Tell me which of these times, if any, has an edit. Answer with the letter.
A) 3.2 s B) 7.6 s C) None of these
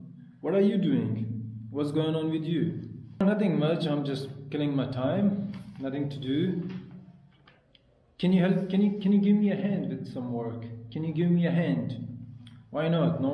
A